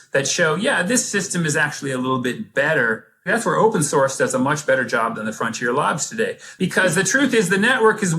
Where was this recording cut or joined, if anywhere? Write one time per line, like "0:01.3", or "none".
0:03.3
0:06.4